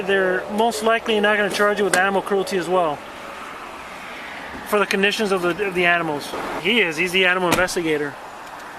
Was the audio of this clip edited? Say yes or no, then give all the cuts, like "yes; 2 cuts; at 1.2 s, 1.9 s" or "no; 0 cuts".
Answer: yes; 1 cut; at 6.6 s